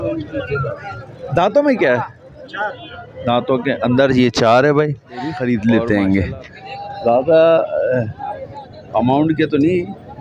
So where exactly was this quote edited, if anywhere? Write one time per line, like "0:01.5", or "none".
0:05.4